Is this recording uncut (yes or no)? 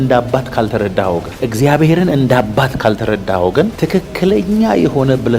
yes